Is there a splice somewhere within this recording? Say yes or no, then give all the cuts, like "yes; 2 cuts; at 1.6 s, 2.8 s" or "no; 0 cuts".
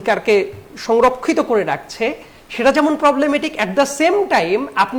no; 0 cuts